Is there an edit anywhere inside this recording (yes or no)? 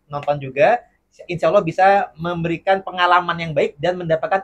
no